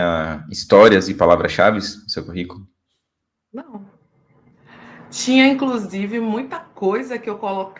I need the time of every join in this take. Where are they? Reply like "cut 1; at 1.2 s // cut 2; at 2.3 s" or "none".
none